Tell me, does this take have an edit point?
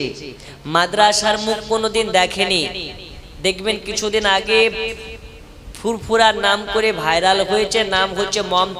no; 0 cuts

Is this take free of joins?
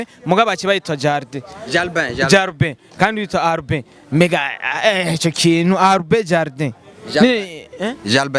yes; 0 cuts

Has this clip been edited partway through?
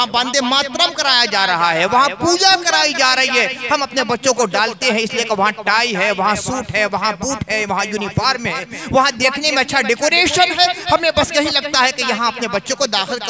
no; 0 cuts

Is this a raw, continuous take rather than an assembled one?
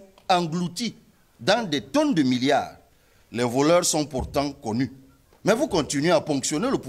yes; 0 cuts

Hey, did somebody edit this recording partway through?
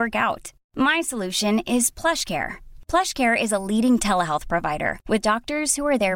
no; 0 cuts

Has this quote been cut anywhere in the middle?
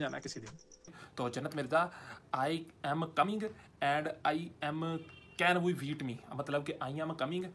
yes; 1 cut; at 1.0 s

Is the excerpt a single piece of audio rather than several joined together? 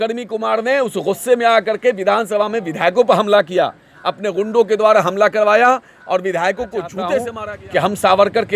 no; 1 cut; at 7.4 s

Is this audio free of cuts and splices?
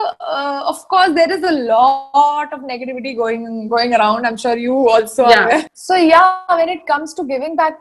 no; 1 cut; at 5.6 s

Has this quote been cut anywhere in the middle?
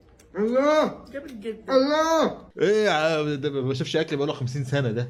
no; 0 cuts

